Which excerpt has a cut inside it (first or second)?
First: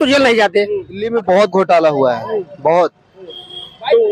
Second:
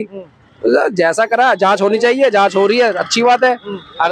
first